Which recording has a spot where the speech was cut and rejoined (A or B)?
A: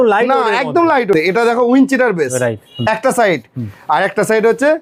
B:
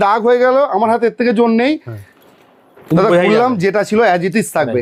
A